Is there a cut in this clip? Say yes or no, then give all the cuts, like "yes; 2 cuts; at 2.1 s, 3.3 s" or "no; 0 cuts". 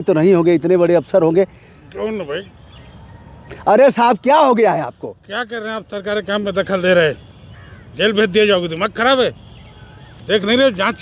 no; 0 cuts